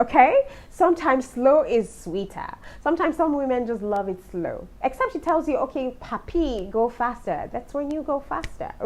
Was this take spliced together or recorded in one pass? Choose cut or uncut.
uncut